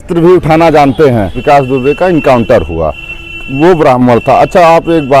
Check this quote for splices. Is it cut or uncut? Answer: cut